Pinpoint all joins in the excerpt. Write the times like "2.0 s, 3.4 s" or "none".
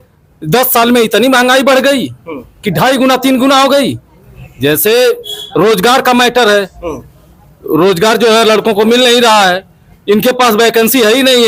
none